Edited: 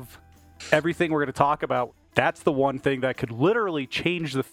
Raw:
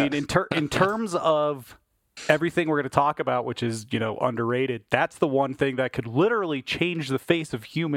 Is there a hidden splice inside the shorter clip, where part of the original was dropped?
yes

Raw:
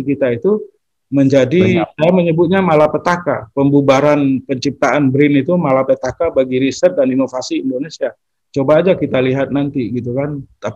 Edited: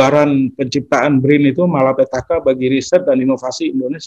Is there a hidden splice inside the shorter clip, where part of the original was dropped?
no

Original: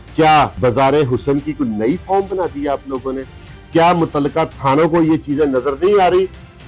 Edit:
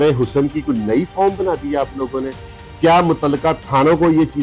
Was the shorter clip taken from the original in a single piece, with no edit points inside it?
yes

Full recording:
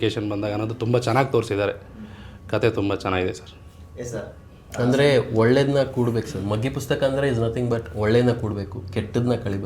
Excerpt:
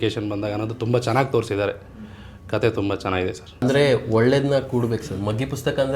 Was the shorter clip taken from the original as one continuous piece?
no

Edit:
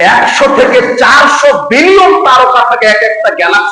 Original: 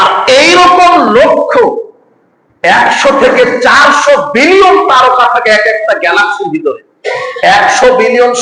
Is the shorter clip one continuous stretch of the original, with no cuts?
yes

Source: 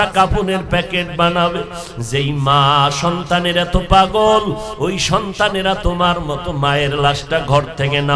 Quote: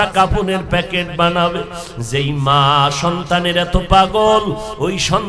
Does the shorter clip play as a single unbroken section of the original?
yes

